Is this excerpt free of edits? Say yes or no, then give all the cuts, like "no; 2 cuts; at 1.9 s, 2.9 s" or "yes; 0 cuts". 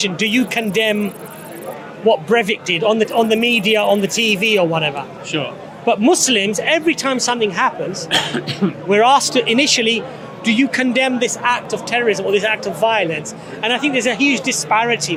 yes; 0 cuts